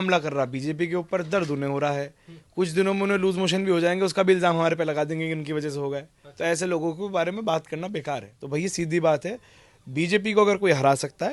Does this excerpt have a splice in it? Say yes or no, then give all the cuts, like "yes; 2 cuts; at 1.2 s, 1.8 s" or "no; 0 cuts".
yes; 1 cut; at 8.3 s